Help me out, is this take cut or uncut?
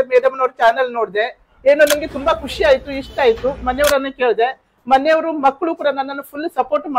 uncut